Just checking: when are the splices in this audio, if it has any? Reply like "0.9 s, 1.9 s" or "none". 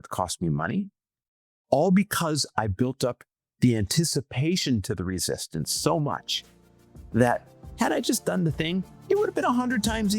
8.9 s